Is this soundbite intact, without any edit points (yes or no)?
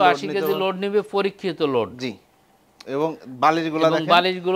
yes